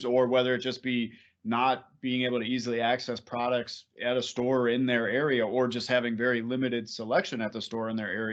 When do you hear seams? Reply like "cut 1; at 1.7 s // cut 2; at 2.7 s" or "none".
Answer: none